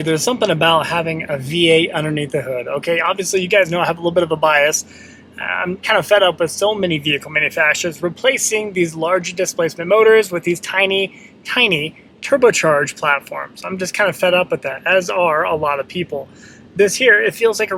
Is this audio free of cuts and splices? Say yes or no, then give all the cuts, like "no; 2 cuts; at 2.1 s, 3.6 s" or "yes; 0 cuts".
yes; 0 cuts